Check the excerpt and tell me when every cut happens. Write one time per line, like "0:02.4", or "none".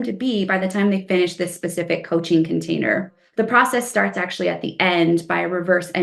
0:03.2